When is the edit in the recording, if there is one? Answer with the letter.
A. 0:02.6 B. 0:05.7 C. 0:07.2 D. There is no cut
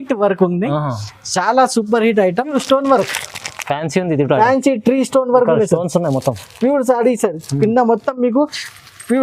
A